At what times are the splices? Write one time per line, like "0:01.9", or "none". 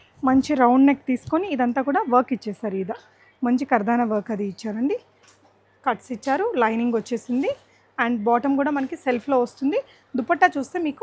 none